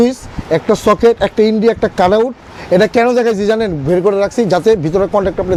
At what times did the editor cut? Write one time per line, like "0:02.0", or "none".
none